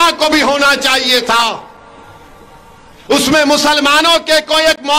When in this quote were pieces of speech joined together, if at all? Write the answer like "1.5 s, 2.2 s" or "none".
none